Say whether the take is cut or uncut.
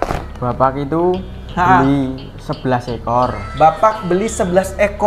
uncut